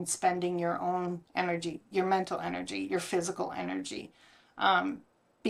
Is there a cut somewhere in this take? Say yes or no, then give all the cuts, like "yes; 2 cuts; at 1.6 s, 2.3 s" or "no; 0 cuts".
no; 0 cuts